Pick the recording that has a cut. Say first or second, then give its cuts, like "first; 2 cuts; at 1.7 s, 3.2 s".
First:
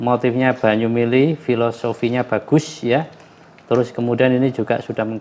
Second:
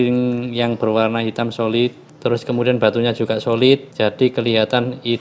second; 2 cuts; at 2.0 s, 3.9 s